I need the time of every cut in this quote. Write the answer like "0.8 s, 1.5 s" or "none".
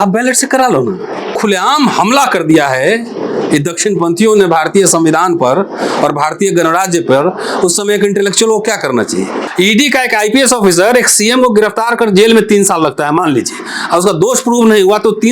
1.3 s, 9.4 s

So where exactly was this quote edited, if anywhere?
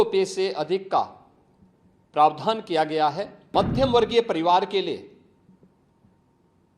3.3 s

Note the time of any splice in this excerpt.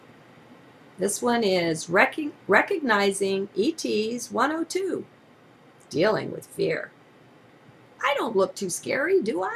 none

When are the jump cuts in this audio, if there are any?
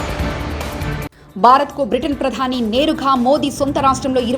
none

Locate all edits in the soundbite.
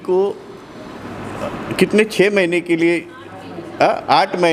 none

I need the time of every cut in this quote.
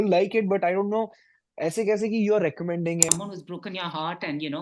3.1 s

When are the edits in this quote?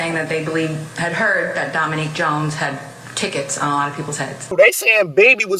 4.5 s

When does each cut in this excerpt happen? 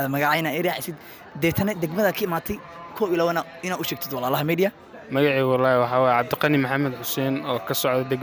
none

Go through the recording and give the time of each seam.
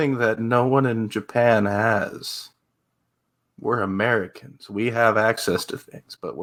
none

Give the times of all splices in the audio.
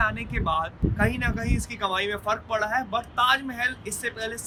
none

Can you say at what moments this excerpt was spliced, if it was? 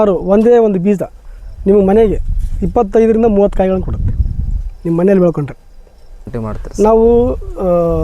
6.3 s

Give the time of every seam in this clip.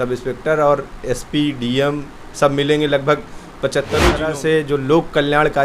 4.0 s

